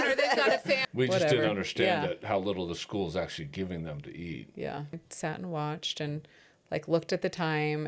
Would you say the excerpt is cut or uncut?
cut